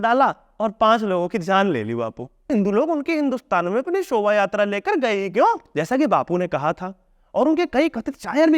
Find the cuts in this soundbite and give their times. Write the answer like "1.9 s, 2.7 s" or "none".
2.5 s, 5.7 s